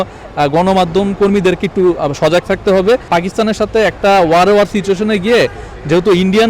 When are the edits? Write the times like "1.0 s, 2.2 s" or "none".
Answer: 3.0 s